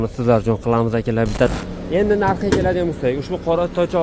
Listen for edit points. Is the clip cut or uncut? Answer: cut